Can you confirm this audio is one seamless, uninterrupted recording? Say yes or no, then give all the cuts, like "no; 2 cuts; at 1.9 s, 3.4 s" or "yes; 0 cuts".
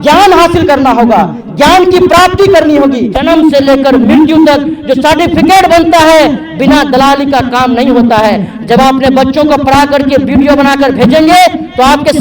no; 1 cut; at 3.1 s